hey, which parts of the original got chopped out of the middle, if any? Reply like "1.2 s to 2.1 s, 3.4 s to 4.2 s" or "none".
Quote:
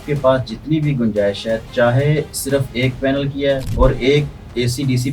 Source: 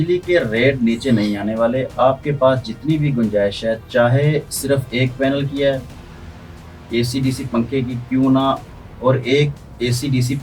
5.8 s to 8.9 s